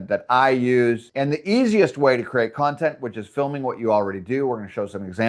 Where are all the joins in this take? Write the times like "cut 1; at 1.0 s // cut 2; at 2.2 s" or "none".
cut 1; at 1.1 s